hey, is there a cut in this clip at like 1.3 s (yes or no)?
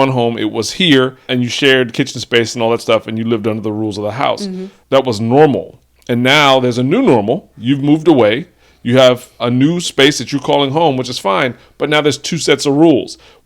yes